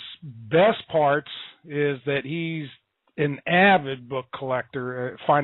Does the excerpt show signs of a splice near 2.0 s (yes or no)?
no